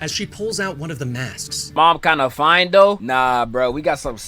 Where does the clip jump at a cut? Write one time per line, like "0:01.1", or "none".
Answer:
0:01.7